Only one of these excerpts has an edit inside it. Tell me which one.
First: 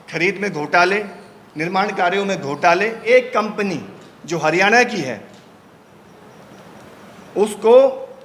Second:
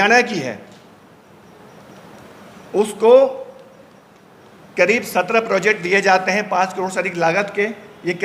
first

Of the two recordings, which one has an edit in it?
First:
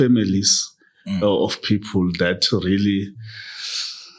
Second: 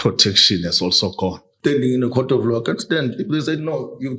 second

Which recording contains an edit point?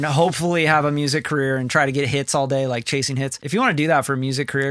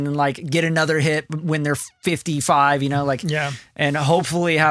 first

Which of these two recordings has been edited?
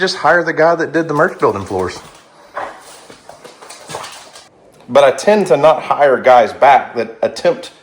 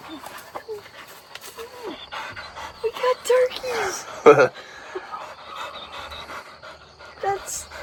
first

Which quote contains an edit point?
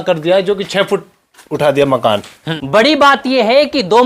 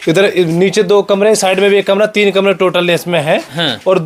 first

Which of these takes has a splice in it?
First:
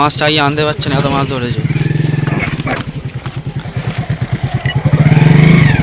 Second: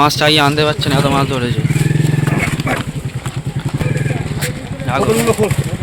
first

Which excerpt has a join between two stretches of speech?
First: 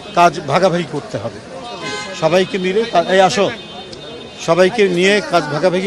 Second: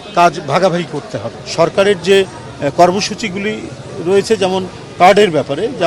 second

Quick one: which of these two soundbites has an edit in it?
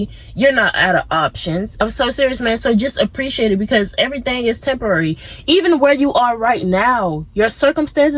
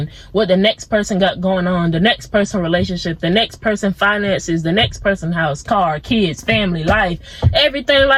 first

